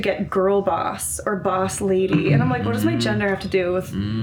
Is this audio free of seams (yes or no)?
yes